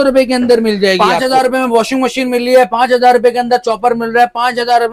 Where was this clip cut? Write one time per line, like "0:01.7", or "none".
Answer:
0:01.1

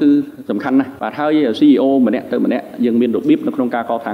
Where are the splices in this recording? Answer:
0:01.0

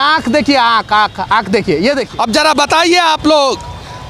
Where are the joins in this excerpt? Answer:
0:02.1

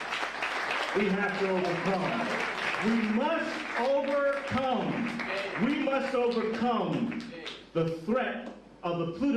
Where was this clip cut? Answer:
0:01.6

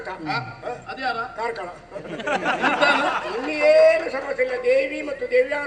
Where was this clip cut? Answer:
none

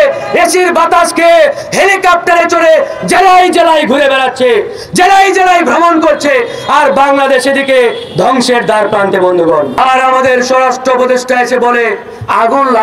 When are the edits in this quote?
0:09.8

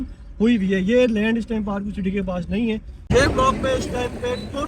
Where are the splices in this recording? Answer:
0:03.0

